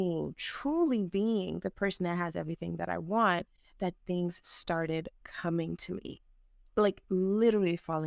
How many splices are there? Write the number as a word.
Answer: zero